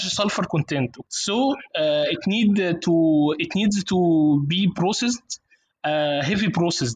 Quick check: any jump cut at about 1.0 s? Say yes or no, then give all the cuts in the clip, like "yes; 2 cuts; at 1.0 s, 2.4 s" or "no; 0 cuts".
yes; 1 cut; at 1.0 s